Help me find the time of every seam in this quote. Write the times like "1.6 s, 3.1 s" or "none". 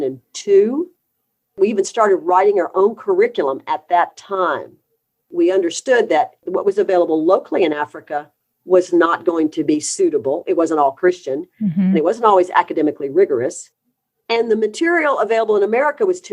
1.6 s, 5.3 s, 6.4 s